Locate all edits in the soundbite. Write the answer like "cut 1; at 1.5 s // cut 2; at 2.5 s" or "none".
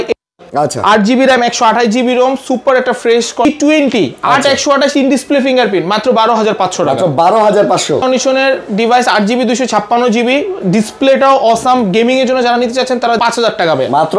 cut 1; at 3.4 s // cut 2; at 8.0 s // cut 3; at 13.2 s